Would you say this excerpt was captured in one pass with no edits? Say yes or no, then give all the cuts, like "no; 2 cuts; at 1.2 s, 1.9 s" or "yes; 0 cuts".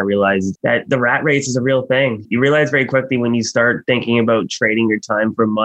no; 1 cut; at 2.2 s